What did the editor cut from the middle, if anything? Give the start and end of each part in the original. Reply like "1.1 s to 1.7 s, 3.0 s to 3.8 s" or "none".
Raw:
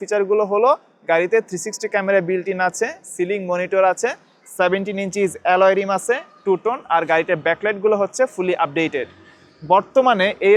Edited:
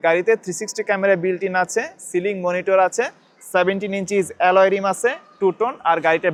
none